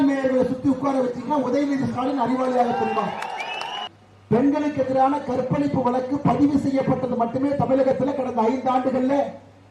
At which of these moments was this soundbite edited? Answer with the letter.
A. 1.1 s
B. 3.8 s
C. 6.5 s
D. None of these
B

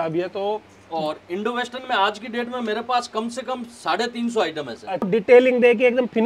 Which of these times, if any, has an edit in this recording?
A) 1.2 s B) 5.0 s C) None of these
B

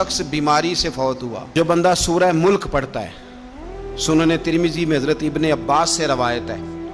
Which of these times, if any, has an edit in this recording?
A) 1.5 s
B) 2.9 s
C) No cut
A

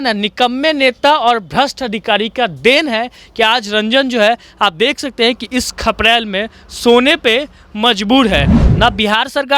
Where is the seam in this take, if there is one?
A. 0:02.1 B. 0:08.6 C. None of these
B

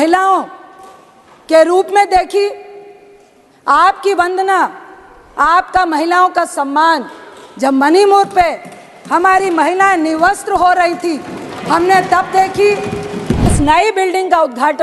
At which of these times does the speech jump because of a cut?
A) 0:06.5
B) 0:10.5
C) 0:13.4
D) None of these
C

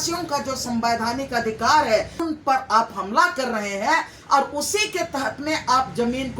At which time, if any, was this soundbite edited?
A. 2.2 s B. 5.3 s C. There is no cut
A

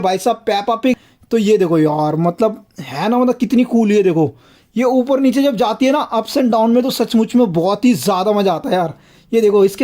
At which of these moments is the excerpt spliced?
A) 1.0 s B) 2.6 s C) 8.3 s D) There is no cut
A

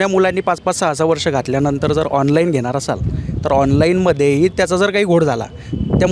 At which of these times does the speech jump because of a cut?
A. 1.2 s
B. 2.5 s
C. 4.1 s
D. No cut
D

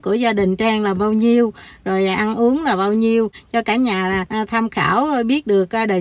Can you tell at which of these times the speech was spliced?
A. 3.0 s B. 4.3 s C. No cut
B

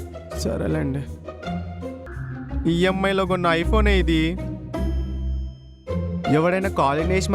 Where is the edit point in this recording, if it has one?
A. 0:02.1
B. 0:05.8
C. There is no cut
A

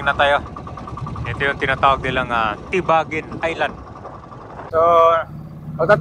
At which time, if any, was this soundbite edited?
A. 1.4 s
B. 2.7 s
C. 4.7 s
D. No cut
C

